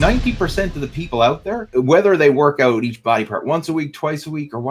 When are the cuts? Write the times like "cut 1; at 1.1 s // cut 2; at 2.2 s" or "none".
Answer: cut 1; at 1.6 s